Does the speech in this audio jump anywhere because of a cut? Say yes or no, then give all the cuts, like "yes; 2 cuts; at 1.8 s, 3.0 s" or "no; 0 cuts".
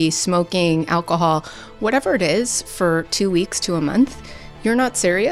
no; 0 cuts